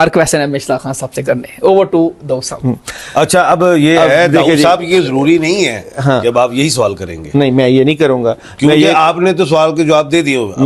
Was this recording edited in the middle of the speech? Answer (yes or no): no